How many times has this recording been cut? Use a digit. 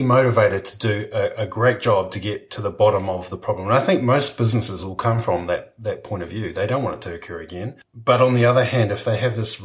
1